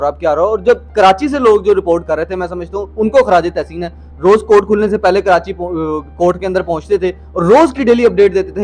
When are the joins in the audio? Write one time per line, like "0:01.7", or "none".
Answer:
none